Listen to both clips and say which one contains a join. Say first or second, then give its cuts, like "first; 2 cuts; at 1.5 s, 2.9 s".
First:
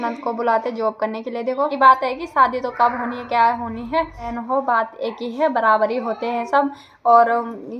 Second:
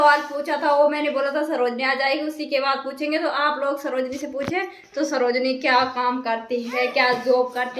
first; 2 cuts; at 1.7 s, 4.4 s